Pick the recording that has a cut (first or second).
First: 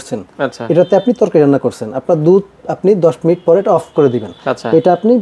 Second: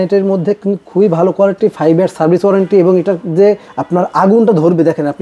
second